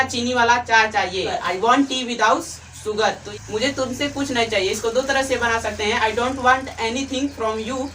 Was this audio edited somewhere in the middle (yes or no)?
yes